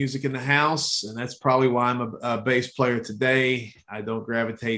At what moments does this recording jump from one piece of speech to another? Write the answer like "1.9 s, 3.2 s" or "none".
none